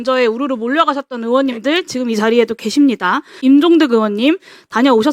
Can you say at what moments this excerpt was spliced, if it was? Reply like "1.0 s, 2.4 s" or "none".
3.4 s